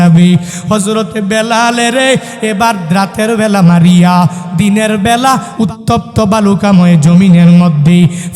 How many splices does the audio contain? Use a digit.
1